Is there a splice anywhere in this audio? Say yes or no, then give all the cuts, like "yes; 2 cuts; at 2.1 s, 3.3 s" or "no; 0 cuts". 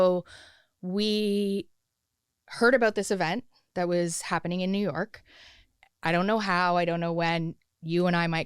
no; 0 cuts